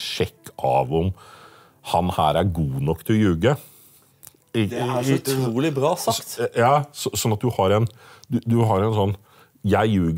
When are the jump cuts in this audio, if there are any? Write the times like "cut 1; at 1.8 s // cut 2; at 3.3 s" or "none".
none